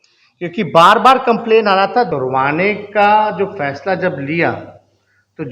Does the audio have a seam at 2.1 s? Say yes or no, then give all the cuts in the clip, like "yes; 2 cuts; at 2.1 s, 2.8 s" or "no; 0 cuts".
yes; 1 cut; at 2.1 s